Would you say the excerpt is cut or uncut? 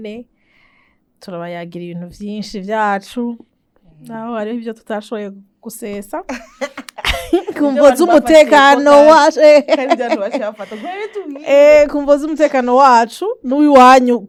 uncut